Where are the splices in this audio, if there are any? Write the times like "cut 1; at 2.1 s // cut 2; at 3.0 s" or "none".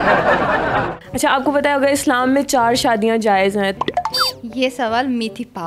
cut 1; at 1.0 s // cut 2; at 3.7 s